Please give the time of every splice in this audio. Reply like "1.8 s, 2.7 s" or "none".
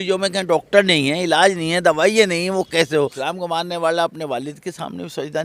3.2 s